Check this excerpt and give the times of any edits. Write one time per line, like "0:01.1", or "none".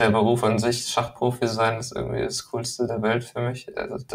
none

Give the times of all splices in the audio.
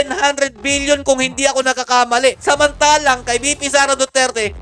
none

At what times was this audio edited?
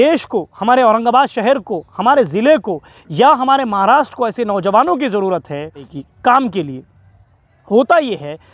0:05.8

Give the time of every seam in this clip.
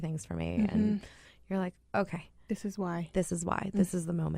none

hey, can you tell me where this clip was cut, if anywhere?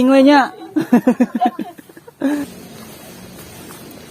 0:02.4

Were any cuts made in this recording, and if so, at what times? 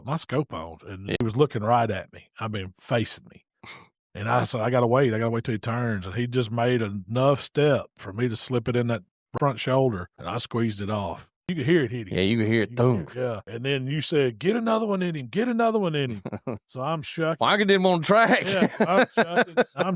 0:01.2
0:09.3
0:10.1
0:11.4
0:13.5

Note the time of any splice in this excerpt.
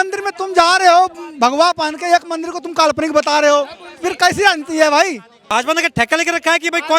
0:05.3

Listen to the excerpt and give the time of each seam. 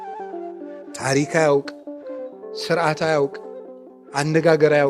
0:01.0

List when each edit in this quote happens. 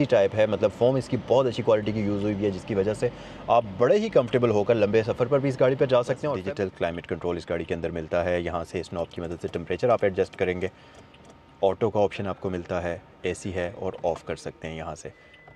0:06.3

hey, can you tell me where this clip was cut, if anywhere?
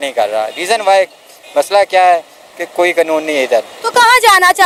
none

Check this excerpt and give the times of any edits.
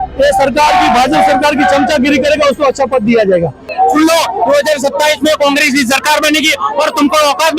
0:03.7

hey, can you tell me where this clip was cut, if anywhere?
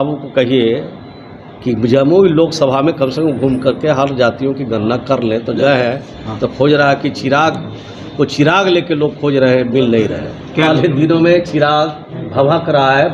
0:05.6
0:10.7

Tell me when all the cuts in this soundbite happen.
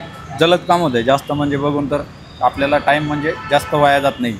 none

